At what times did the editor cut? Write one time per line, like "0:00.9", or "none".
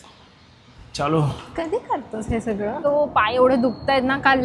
0:02.8